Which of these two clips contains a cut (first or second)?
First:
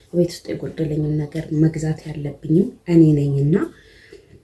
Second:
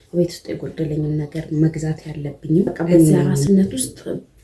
second